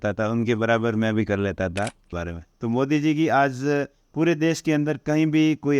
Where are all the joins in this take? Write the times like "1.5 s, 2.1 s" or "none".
2.0 s